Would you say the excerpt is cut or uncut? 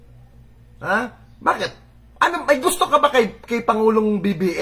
uncut